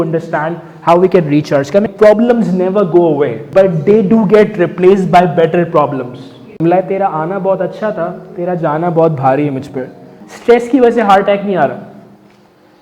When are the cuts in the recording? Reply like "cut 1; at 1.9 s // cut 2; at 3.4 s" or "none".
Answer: cut 1; at 1.9 s // cut 2; at 3.4 s // cut 3; at 6.6 s // cut 4; at 10.2 s